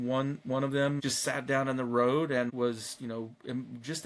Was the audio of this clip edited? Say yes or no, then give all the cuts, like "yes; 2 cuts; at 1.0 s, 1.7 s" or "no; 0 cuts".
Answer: yes; 2 cuts; at 1.0 s, 2.5 s